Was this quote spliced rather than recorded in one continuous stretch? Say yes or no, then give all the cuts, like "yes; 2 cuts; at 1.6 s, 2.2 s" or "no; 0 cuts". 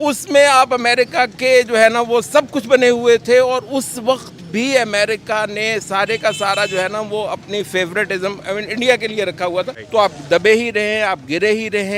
yes; 1 cut; at 9.8 s